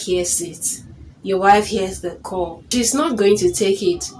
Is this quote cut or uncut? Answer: uncut